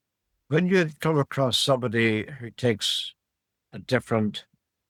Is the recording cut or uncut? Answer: uncut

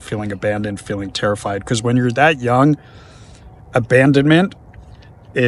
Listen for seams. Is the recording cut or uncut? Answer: uncut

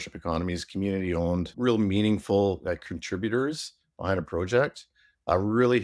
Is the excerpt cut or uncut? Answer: cut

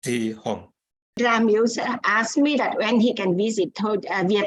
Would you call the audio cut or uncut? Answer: cut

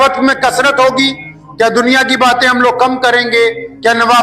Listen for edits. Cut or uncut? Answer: uncut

